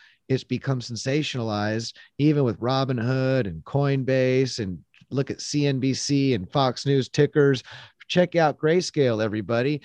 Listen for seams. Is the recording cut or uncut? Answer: uncut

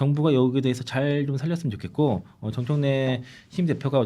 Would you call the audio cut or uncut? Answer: uncut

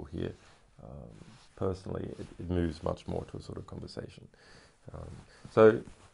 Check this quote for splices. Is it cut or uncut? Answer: cut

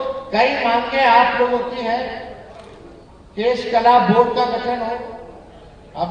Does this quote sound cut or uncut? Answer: uncut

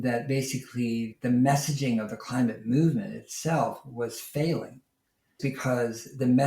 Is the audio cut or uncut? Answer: cut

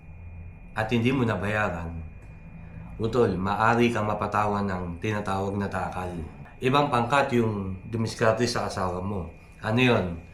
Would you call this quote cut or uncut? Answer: cut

